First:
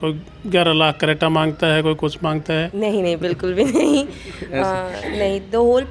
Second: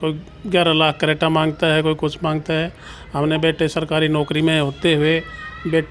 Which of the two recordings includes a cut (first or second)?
first